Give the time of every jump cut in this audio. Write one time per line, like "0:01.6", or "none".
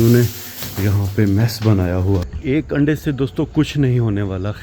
0:02.3